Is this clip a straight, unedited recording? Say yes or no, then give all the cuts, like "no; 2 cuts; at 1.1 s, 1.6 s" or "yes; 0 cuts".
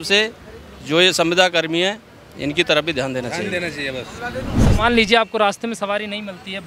no; 1 cut; at 4.6 s